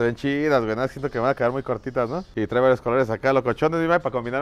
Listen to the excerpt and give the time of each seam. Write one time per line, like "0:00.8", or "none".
0:02.2